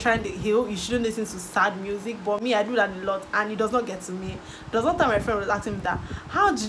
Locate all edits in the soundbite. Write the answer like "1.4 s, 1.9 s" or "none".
none